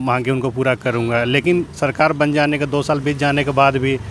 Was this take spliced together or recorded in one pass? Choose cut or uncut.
uncut